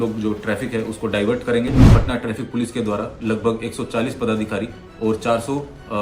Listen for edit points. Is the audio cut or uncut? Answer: cut